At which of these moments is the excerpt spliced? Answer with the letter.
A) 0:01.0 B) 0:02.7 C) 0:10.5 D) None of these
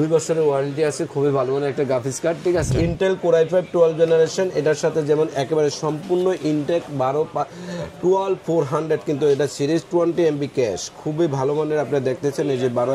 B